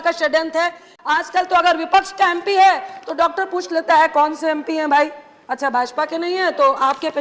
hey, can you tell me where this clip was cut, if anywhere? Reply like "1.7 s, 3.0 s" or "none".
0.9 s